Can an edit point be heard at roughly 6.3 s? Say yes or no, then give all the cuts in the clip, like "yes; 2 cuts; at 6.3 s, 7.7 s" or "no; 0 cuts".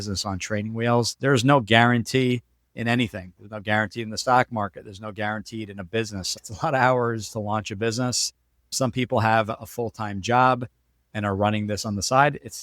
yes; 1 cut; at 6.3 s